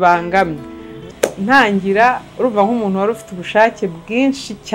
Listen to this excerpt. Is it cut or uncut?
cut